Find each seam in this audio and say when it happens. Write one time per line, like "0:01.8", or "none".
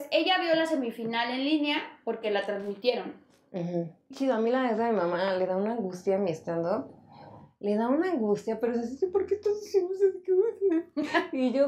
0:04.1